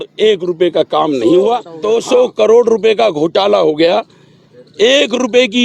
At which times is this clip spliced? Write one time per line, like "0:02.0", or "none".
0:01.7